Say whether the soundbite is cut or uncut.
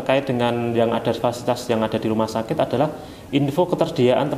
uncut